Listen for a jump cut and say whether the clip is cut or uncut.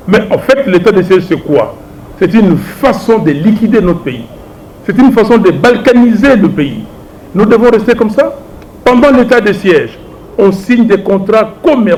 uncut